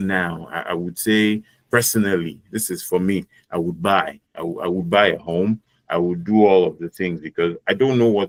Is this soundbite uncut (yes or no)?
yes